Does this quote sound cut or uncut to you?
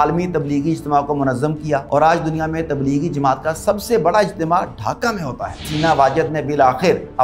cut